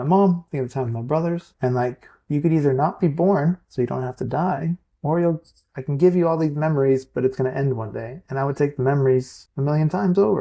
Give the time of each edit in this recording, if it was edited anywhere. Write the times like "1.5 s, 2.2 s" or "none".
1.5 s, 9.4 s